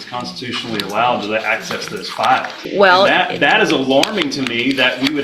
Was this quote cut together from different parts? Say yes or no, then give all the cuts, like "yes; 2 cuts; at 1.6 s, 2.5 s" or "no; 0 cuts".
yes; 1 cut; at 2.6 s